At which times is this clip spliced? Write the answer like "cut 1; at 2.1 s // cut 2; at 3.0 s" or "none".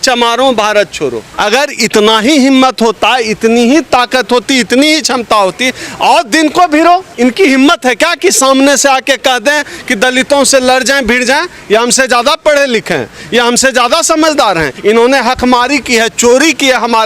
cut 1; at 1.3 s // cut 2; at 7.1 s // cut 3; at 14.7 s